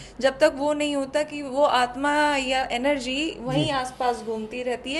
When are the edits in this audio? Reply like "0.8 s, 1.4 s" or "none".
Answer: none

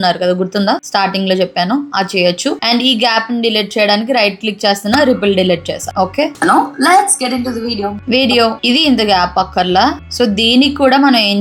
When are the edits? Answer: none

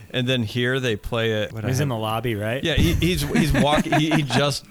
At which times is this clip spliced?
1.5 s

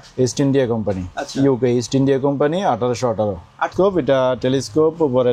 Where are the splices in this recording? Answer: 3.7 s

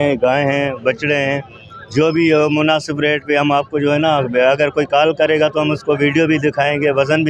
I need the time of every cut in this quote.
none

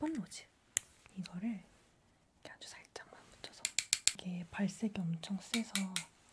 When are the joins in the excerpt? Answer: 4.2 s

